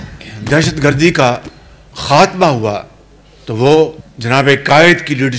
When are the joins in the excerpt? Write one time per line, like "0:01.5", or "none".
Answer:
0:04.1